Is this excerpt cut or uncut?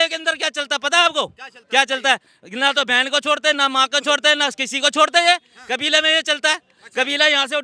uncut